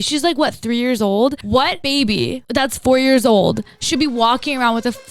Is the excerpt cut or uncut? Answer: cut